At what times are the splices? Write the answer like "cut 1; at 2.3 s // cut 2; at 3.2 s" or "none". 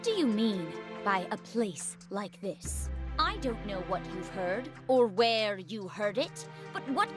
cut 1; at 2.8 s